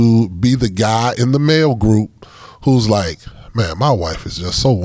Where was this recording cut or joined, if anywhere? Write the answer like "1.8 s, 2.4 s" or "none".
none